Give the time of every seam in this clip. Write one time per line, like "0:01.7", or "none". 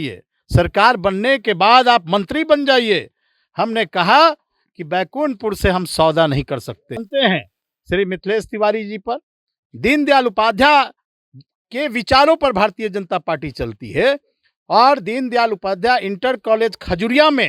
0:07.1